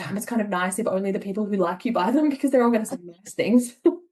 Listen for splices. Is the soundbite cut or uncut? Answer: uncut